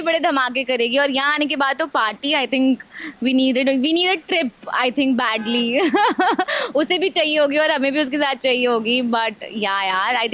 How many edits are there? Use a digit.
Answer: 0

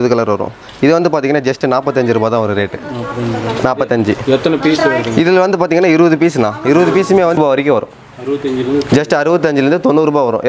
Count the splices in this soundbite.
1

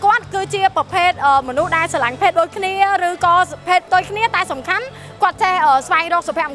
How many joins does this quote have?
0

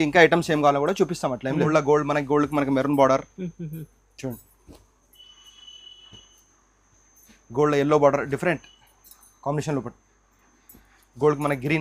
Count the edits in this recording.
1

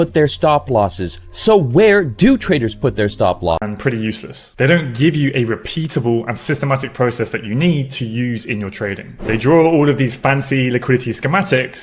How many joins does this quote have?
1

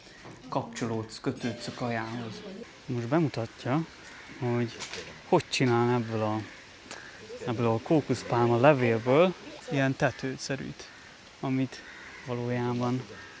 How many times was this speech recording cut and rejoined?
2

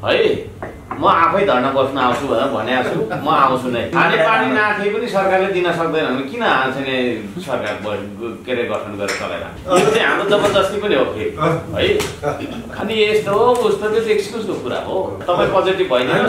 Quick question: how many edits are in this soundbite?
4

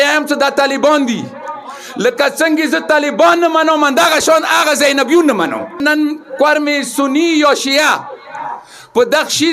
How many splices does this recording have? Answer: 1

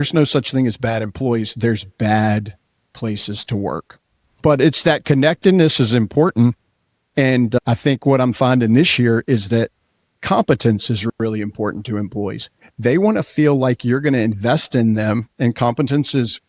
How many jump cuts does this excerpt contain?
0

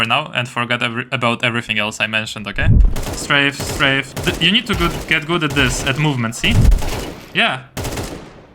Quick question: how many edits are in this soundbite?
3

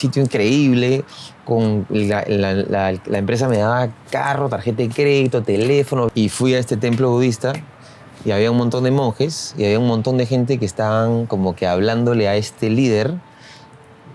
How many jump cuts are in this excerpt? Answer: 1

